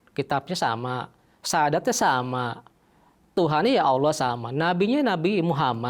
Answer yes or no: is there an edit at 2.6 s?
no